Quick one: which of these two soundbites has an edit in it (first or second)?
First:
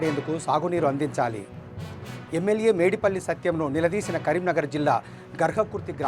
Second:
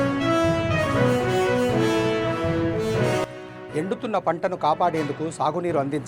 second